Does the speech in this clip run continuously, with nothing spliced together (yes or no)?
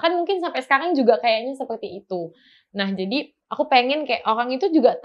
yes